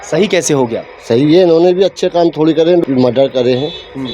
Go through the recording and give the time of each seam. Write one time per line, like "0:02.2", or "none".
0:02.8